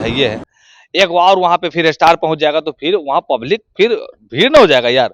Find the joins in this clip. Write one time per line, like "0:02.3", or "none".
none